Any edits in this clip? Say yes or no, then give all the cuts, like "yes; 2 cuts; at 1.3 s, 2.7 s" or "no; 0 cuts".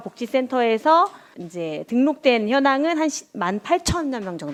no; 0 cuts